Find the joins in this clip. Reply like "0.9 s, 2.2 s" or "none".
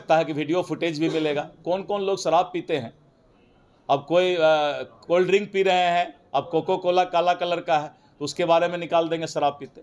none